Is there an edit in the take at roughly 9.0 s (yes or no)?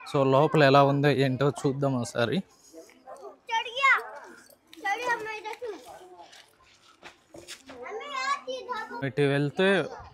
yes